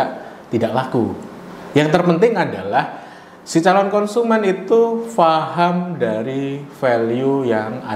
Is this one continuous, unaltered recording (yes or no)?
yes